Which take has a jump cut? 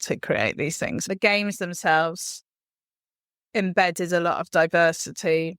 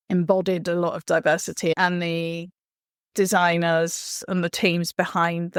first; 1 cut; at 1.0 s

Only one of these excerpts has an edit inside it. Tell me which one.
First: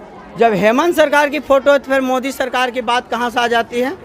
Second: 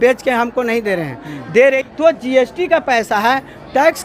second; 1 cut; at 1.8 s

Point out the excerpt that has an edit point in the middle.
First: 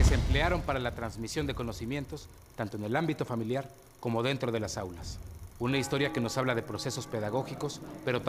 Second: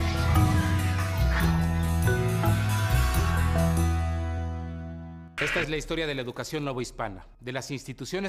first; 1 cut; at 7.0 s

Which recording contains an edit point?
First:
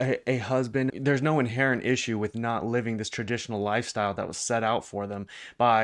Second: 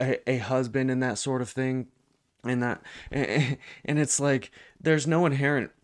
first; 1 cut; at 0.9 s

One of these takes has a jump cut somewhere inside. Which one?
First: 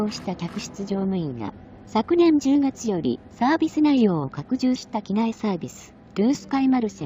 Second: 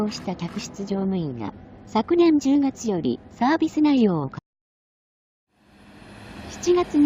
first; 1 cut; at 4.4 s

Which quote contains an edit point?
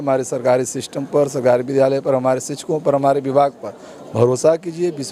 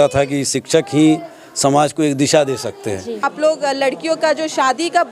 second; 1 cut; at 3.3 s

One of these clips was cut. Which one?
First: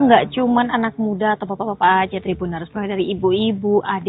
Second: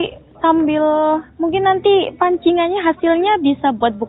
first; 2 cuts; at 1.5 s, 3.3 s

